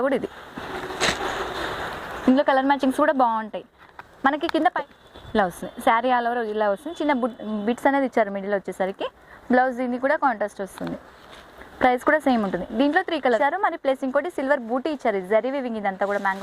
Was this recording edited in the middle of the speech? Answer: yes; 2 cuts; at 4.9 s, 13.4 s

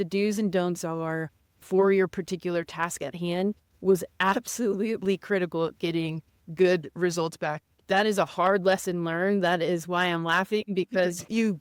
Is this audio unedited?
yes; 0 cuts

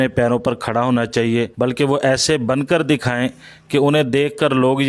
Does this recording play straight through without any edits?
no; 1 cut; at 1.5 s

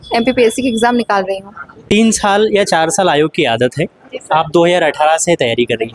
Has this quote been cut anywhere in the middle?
no; 0 cuts

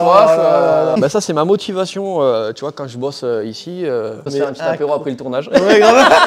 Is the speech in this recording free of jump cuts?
no; 2 cuts; at 1.0 s, 4.3 s

